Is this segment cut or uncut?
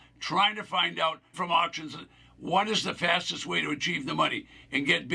cut